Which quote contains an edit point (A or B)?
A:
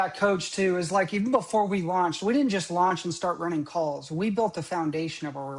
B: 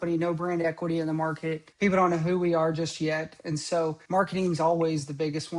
B